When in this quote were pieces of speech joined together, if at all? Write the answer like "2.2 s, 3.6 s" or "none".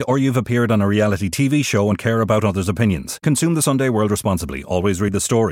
none